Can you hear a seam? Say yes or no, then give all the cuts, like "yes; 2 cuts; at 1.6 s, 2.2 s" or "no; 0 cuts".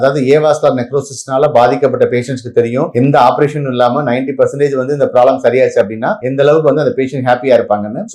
no; 0 cuts